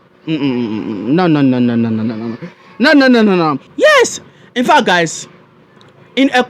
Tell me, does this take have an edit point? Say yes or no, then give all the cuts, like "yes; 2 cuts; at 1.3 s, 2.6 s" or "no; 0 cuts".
yes; 1 cut; at 3.6 s